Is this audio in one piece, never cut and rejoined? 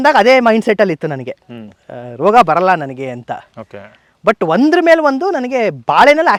yes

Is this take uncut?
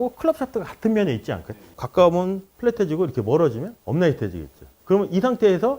no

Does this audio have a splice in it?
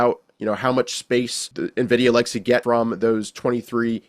yes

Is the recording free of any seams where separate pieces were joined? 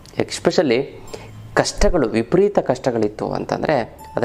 yes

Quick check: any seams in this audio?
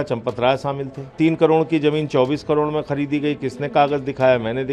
yes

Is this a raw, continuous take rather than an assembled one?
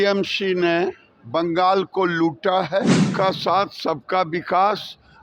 no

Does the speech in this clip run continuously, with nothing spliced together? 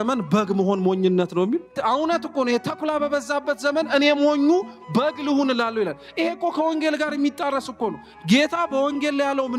no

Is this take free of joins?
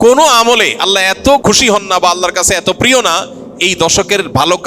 no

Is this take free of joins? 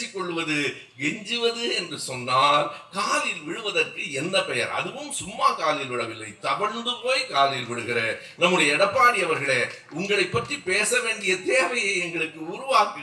yes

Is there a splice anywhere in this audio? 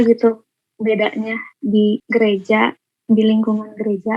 yes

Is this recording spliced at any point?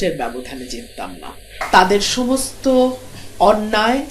yes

